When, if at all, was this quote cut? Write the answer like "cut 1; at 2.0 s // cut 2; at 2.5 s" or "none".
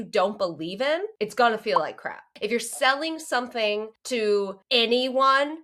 cut 1; at 1.1 s // cut 2; at 2.3 s // cut 3; at 4.0 s // cut 4; at 4.6 s